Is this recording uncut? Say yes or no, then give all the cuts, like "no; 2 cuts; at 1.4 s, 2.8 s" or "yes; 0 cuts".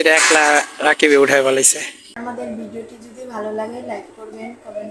no; 1 cut; at 2.2 s